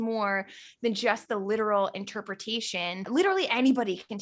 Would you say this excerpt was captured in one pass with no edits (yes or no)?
no